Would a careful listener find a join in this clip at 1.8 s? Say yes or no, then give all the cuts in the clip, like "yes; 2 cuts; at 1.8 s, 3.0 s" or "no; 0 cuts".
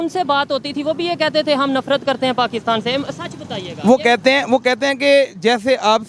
no; 0 cuts